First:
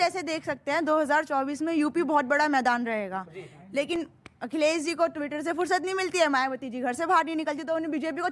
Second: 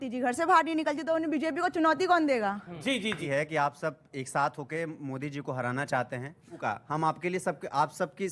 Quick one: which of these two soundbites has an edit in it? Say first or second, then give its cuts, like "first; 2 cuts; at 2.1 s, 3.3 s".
second; 2 cuts; at 3.3 s, 6.6 s